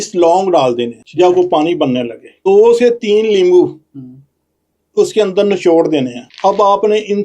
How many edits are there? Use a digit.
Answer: 3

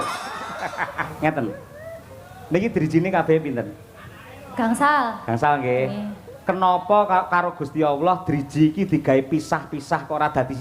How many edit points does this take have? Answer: 1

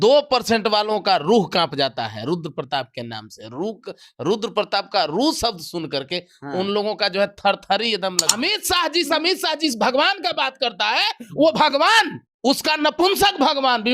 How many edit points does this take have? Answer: 2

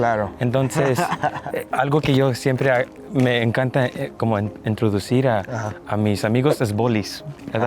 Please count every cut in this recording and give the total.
1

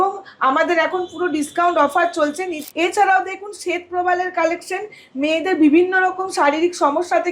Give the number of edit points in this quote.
1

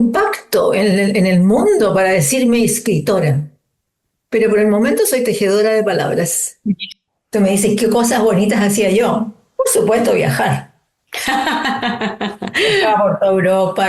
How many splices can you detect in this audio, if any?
1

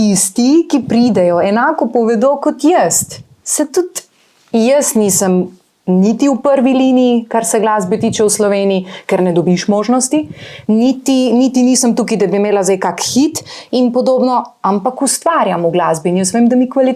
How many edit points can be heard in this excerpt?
0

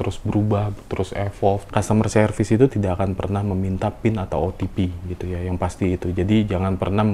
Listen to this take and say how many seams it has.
1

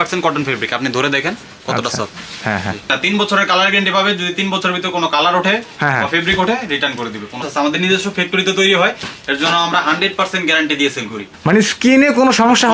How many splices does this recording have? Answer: 3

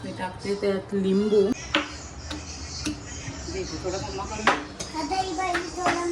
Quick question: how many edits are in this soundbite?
1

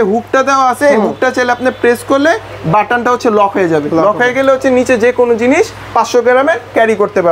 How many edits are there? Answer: 0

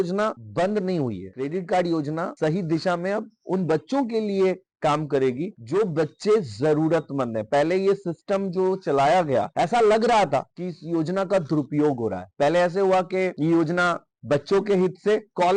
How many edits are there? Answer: 0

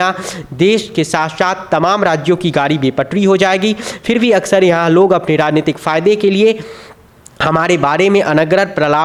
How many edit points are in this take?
0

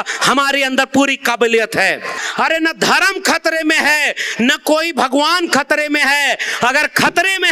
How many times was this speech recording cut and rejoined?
1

